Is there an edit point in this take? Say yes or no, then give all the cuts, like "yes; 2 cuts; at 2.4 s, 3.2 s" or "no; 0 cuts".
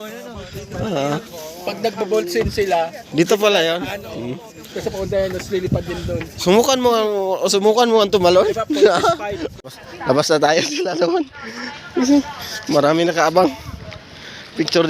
yes; 1 cut; at 9.5 s